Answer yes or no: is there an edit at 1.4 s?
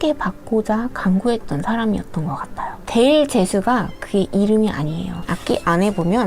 no